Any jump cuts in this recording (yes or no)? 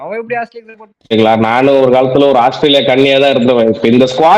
yes